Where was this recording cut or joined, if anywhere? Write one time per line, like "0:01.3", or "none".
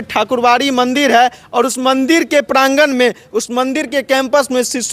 none